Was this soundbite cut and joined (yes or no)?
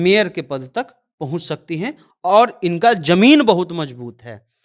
no